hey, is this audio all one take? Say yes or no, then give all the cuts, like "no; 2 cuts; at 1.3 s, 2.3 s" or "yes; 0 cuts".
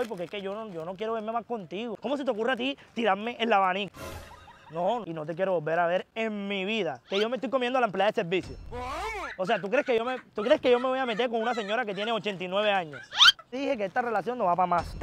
no; 3 cuts; at 1.9 s, 5.0 s, 13.6 s